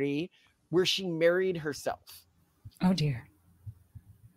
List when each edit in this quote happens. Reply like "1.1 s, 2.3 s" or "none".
none